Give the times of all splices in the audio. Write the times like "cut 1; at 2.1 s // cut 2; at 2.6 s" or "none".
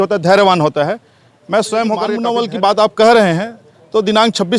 cut 1; at 2.2 s

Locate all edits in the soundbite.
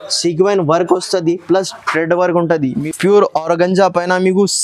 cut 1; at 2.8 s

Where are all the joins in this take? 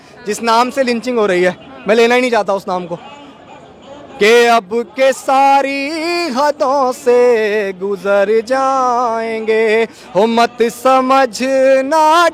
none

